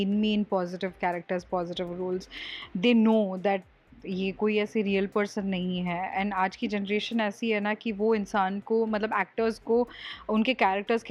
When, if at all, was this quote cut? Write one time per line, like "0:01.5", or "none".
none